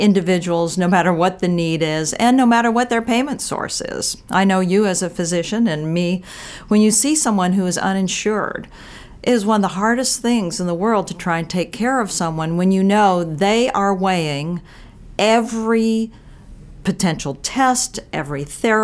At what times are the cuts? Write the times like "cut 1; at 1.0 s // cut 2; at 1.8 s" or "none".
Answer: none